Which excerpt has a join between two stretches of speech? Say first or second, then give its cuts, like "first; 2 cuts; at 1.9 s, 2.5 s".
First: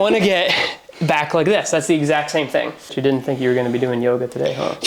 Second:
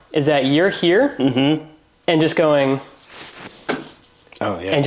first; 1 cut; at 2.9 s